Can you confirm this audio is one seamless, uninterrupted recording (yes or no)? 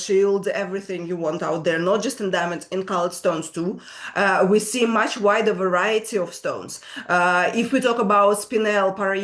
yes